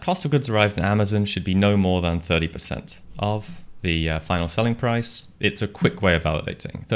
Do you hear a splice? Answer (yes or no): yes